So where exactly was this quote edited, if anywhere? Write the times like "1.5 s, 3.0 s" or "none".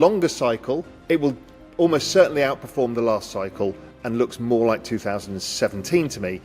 0.9 s